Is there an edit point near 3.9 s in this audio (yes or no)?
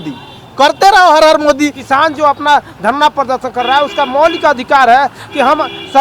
no